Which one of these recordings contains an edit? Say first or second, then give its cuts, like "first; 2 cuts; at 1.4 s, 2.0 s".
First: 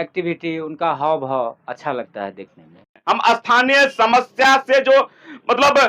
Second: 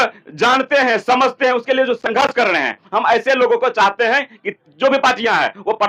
first; 1 cut; at 3.0 s